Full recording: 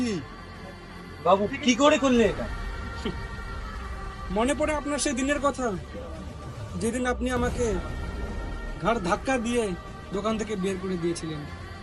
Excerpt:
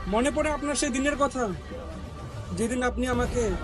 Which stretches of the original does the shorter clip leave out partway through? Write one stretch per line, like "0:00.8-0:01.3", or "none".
none